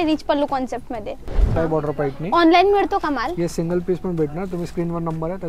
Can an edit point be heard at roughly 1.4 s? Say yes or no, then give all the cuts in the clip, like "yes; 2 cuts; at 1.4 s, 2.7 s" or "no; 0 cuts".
yes; 1 cut; at 1.4 s